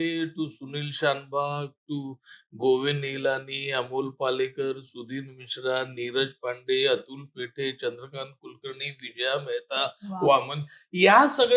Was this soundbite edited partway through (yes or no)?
no